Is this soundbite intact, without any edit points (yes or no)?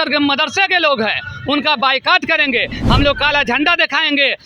no